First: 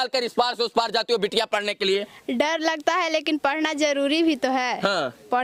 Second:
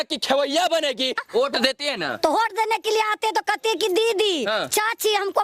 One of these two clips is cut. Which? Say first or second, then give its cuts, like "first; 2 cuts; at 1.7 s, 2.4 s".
second; 1 cut; at 1.2 s